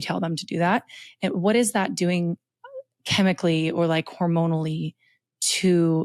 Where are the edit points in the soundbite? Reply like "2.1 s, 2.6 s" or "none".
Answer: none

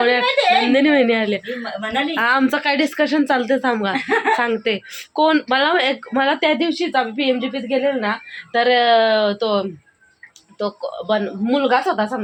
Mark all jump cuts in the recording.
none

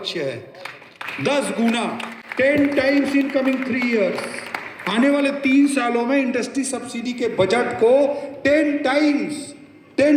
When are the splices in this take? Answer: none

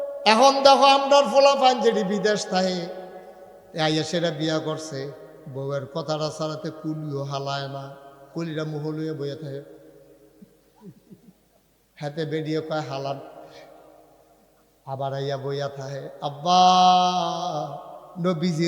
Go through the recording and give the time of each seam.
none

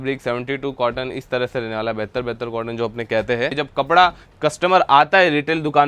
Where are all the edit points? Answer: 3.6 s

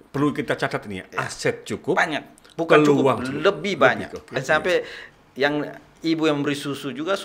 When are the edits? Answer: 4.4 s

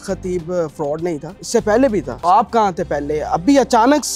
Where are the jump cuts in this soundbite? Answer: 1.3 s, 2.1 s

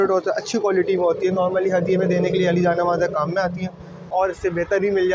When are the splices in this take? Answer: 4.1 s

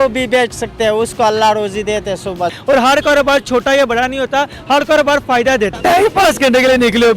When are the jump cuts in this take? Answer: 2.6 s, 5.7 s

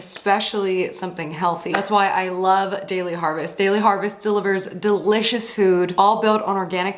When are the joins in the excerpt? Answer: 1.7 s

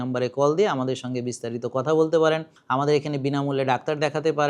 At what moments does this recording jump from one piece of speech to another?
2.5 s

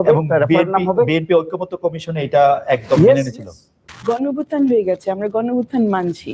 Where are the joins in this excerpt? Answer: 3.8 s

